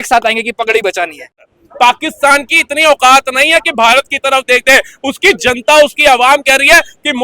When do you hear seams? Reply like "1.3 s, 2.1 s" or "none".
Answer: 1.6 s